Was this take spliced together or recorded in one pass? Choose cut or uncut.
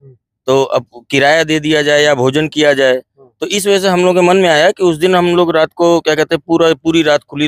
uncut